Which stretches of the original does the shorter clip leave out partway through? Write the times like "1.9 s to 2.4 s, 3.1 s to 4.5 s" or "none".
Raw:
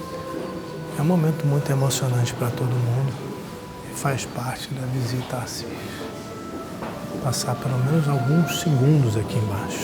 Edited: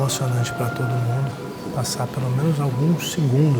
3.4 s to 7.1 s